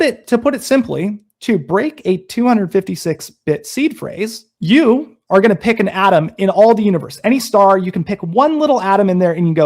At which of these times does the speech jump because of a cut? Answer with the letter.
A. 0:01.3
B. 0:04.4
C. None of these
C